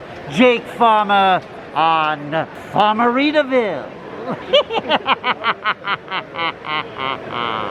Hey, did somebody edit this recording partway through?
yes; 2 cuts; at 2.6 s, 4.3 s

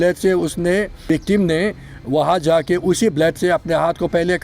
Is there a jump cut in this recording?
yes; 1 cut; at 1.0 s

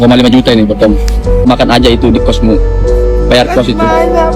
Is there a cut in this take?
yes; 1 cut; at 1.5 s

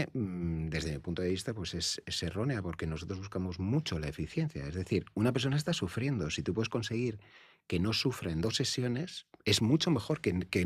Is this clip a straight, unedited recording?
yes; 0 cuts

